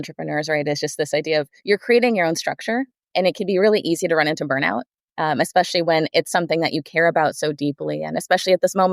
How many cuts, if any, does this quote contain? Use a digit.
1